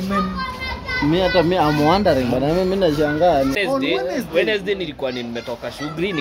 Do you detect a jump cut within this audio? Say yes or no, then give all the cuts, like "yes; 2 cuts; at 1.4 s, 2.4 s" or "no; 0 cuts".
yes; 1 cut; at 3.6 s